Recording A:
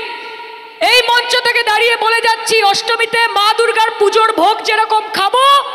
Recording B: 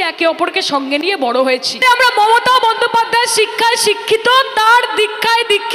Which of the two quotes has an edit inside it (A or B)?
B